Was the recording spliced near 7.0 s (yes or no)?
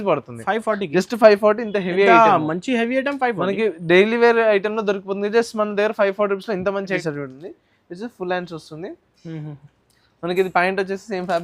yes